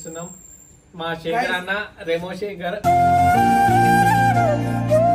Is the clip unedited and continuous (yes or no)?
yes